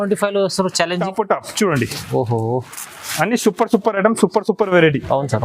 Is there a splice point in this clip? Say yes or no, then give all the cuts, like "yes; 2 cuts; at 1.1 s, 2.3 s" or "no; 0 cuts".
yes; 1 cut; at 1.0 s